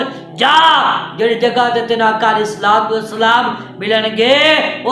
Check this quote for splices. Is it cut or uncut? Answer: uncut